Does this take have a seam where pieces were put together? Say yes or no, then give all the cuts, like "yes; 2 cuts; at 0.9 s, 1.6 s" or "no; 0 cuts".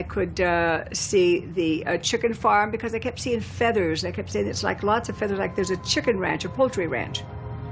yes; 1 cut; at 1.2 s